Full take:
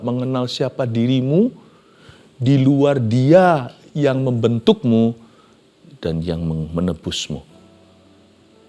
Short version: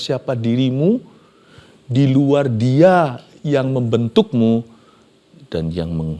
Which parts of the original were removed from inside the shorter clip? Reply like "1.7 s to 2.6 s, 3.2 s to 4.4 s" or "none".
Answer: none